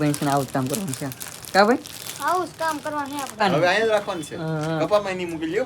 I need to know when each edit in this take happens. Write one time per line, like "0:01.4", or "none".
0:03.4